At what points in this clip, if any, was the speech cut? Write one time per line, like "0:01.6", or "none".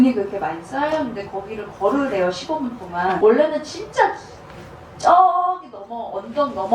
0:03.2